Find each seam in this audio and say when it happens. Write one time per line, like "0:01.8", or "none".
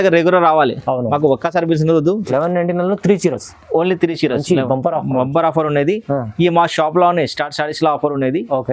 0:02.2